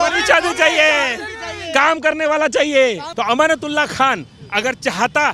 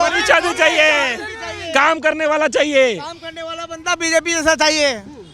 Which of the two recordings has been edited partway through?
first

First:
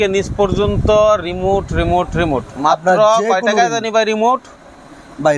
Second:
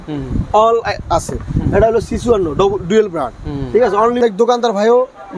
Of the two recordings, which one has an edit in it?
second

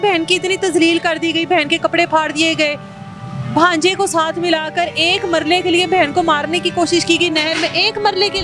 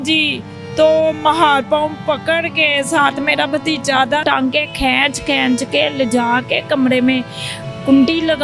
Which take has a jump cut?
second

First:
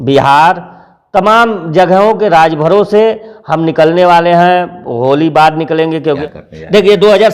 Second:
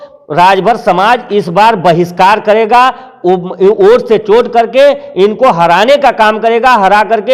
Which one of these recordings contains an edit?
first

